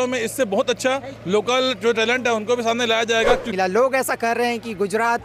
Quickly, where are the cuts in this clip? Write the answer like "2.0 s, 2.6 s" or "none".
3.5 s